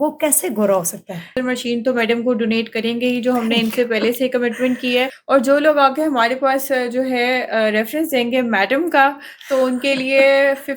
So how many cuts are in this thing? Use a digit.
1